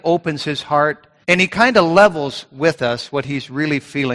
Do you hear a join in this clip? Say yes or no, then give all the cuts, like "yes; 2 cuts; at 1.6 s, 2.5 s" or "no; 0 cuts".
yes; 1 cut; at 1.1 s